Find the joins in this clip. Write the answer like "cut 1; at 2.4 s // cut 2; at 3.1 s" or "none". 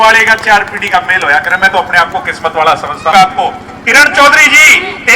cut 1; at 3.1 s